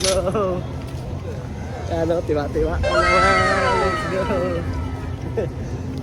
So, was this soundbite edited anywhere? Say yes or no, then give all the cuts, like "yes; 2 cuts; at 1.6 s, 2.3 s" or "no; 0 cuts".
no; 0 cuts